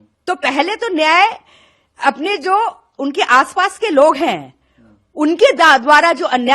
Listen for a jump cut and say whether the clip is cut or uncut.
uncut